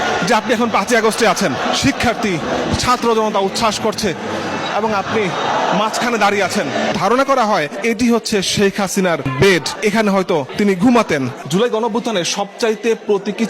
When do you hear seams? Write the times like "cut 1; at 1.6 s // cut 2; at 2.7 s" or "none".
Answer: cut 1; at 1.6 s // cut 2; at 6.9 s // cut 3; at 11.4 s